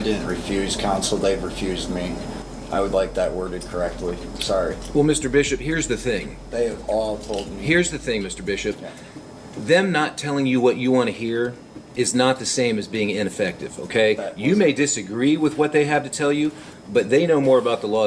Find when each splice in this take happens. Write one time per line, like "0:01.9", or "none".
none